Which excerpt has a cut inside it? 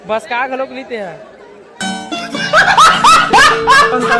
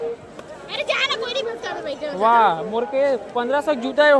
first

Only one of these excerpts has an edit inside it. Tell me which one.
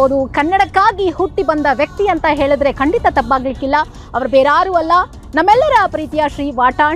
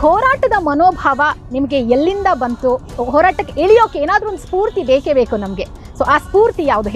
second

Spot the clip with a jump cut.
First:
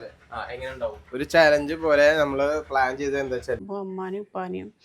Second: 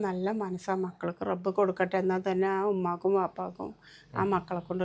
first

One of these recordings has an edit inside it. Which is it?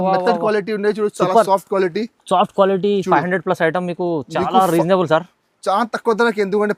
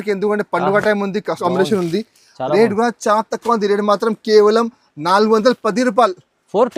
second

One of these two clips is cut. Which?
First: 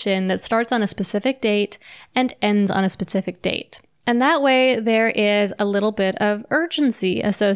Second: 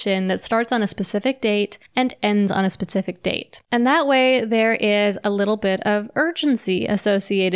second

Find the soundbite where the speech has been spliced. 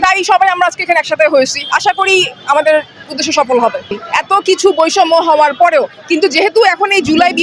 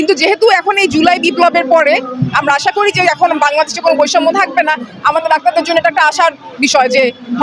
first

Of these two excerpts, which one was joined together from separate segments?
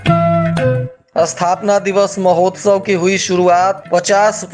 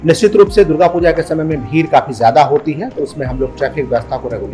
first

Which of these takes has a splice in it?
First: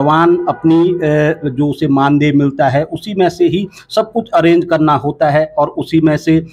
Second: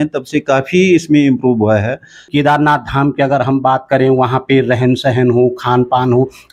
second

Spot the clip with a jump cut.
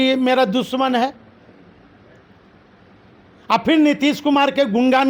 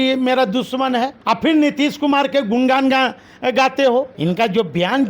second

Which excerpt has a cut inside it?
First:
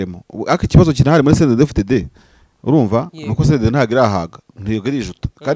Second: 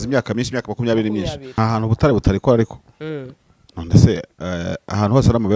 second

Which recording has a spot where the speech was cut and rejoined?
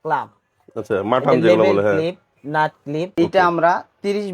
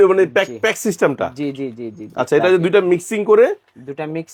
first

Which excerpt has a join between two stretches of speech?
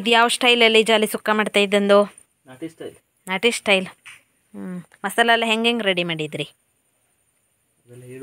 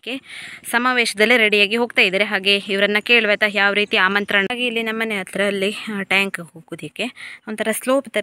second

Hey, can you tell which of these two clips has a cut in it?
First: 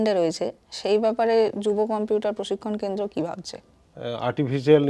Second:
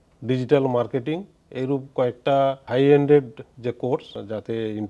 first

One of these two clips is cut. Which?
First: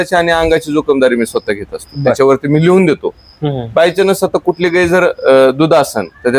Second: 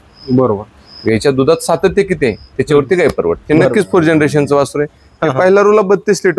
second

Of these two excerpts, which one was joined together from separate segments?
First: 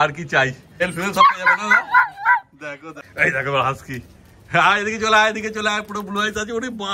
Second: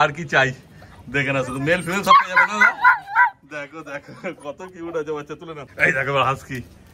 first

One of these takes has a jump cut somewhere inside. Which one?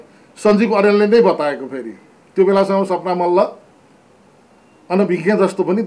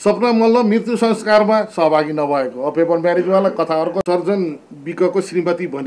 second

